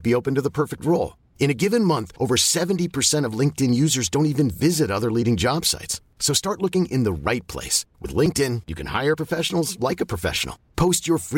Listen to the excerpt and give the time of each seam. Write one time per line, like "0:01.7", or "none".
none